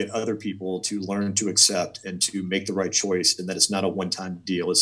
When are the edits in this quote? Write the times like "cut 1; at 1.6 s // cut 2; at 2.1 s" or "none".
none